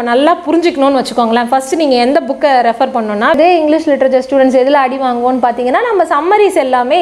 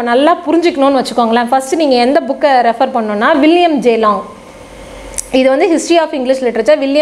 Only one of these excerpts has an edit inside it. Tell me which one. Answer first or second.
first